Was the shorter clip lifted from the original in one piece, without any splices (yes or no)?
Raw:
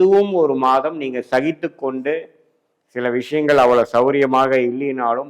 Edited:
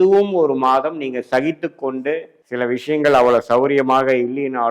no